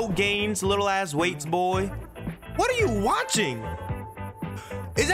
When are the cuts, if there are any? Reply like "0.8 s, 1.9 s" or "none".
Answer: none

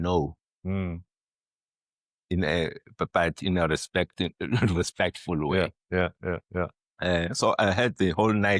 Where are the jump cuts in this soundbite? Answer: none

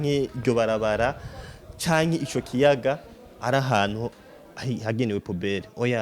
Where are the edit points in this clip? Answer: none

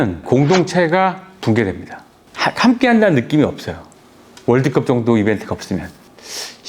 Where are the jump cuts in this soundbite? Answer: 2.0 s

